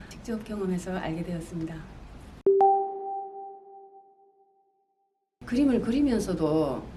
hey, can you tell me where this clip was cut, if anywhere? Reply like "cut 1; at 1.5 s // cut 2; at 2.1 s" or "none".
none